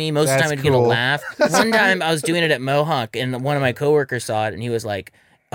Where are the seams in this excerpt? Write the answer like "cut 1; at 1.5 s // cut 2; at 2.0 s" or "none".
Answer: cut 1; at 1.2 s